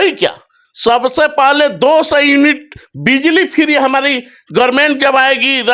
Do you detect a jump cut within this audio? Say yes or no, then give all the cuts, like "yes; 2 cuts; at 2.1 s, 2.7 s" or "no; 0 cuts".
no; 0 cuts